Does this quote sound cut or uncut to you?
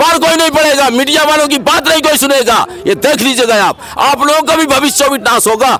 uncut